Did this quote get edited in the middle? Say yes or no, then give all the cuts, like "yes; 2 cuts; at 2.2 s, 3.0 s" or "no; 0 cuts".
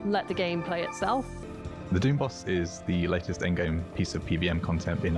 yes; 1 cut; at 1.3 s